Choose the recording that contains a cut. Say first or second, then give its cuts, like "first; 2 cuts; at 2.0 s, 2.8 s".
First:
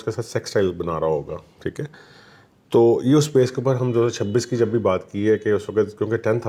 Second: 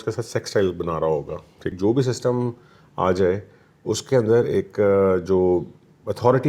second; 1 cut; at 1.8 s